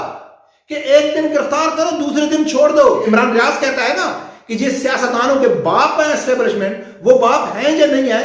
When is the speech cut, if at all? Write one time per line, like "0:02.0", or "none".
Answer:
0:03.0